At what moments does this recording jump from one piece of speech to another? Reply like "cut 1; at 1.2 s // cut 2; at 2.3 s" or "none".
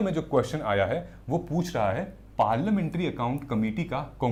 none